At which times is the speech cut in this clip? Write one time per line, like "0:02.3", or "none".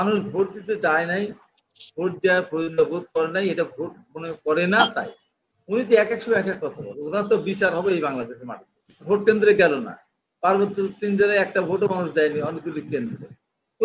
0:09.0